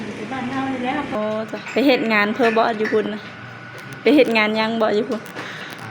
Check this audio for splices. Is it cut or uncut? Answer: cut